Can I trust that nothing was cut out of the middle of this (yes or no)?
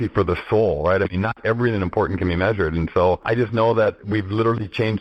no